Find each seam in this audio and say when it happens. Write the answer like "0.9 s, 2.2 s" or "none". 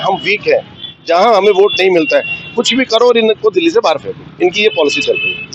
none